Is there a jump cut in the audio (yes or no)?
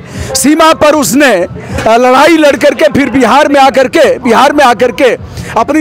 no